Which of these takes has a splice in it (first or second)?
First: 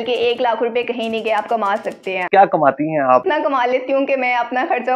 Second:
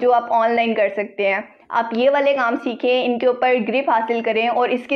first